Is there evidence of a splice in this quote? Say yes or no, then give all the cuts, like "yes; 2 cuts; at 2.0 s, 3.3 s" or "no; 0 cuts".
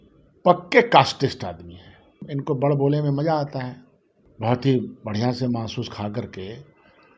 yes; 1 cut; at 2.2 s